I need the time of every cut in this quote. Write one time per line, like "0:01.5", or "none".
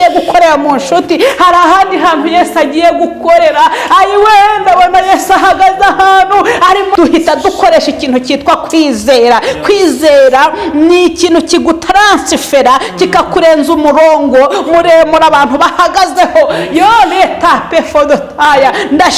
0:06.9